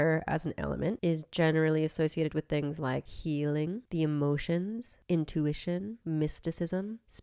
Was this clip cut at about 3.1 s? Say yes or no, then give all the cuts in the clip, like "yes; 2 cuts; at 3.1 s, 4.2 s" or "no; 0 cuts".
yes; 2 cuts; at 1.0 s, 3.1 s